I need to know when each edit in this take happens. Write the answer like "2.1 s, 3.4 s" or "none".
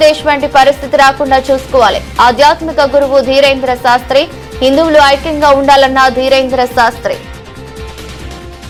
none